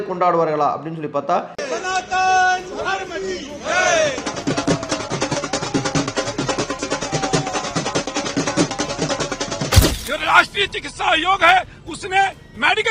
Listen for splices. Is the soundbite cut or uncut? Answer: uncut